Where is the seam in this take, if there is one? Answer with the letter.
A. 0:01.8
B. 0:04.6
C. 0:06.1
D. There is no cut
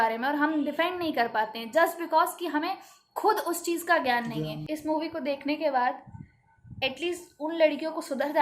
B